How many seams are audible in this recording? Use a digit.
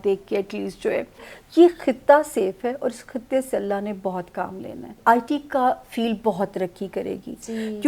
2